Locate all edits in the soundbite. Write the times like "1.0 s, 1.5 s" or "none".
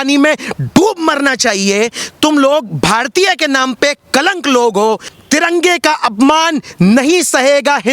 5.1 s